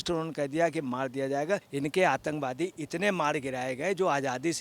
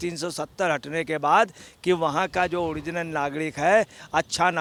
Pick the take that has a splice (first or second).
first